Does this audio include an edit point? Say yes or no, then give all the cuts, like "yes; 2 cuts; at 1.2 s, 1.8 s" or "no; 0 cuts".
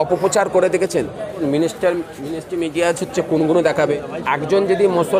yes; 2 cuts; at 1.3 s, 3.9 s